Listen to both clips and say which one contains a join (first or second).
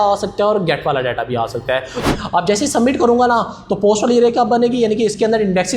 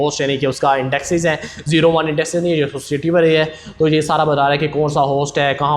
first